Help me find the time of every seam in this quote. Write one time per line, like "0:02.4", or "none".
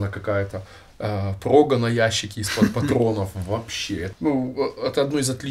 0:04.1